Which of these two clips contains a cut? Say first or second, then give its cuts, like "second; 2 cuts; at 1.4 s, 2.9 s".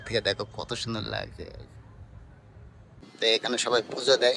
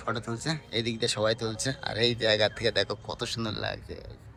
first; 1 cut; at 3.0 s